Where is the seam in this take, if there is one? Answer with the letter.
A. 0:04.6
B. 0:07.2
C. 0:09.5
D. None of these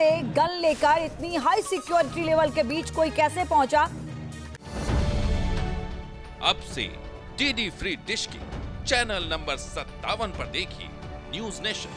A